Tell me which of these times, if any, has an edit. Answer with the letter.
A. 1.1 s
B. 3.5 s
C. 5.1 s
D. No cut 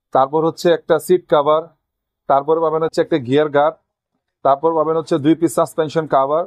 D